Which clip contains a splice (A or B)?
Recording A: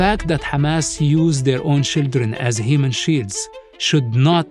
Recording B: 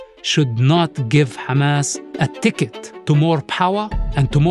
B